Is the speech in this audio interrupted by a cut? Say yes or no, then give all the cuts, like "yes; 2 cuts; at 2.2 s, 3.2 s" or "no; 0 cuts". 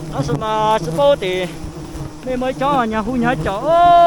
no; 0 cuts